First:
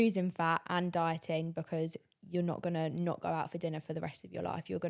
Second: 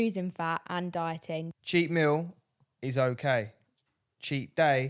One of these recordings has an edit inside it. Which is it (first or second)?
second